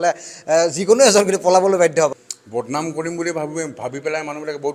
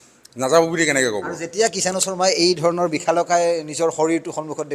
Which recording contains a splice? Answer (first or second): first